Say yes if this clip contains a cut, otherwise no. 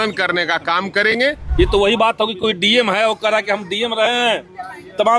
yes